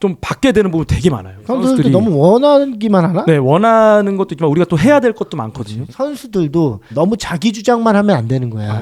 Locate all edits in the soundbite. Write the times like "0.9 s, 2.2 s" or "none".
1.3 s, 5.8 s